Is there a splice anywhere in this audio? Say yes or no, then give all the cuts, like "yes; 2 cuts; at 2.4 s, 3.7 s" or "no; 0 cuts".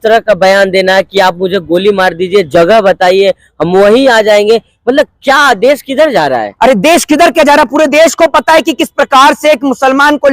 no; 0 cuts